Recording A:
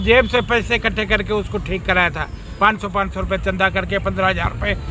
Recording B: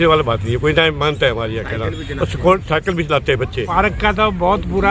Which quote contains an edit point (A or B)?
B